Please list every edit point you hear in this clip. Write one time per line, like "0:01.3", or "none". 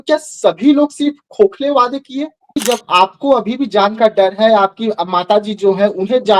0:02.5